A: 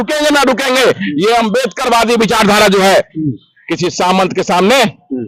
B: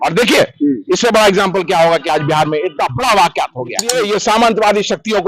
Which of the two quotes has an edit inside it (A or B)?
B